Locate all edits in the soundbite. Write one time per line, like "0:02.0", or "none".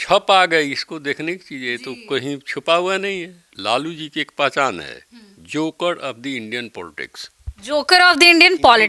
0:03.5

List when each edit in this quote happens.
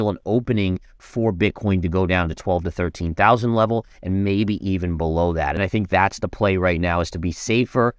0:05.6

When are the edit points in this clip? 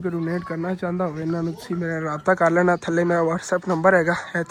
none

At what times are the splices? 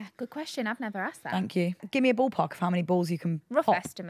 0:01.8

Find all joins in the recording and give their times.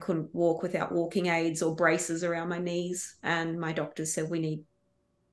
none

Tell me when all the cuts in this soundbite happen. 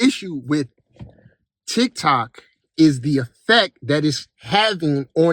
none

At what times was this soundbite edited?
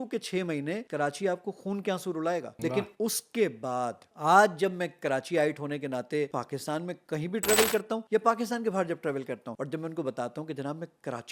0:00.8
0:02.5
0:06.3
0:08.0
0:09.5

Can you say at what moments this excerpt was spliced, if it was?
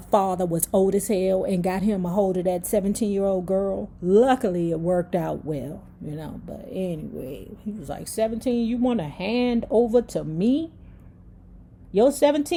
none

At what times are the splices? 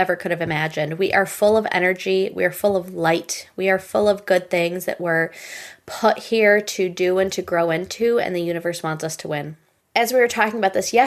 none

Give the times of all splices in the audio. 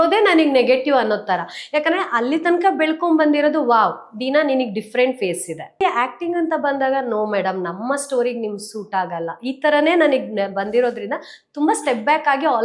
0:05.8

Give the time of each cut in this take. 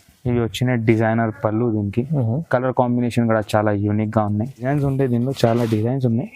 0:04.6

